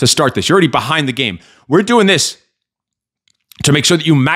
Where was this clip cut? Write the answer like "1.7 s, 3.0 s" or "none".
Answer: none